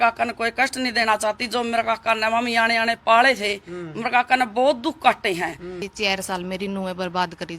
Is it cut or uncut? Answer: cut